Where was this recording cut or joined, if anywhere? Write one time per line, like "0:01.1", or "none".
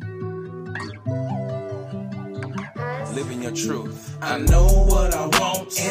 0:01.0